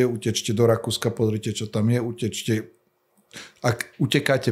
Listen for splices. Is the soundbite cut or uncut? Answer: uncut